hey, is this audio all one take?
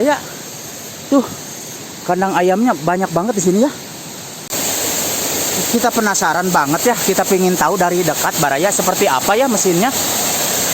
no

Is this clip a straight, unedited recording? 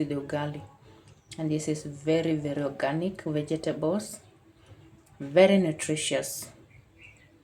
yes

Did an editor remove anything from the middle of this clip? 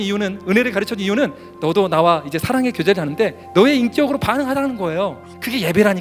no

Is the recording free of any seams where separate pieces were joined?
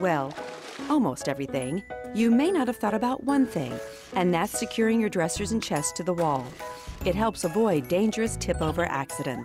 yes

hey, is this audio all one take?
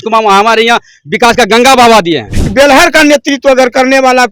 no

